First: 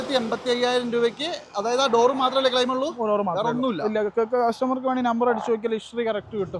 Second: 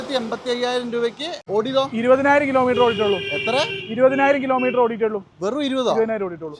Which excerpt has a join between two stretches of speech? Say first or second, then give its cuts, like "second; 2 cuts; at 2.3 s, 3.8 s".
second; 1 cut; at 1.3 s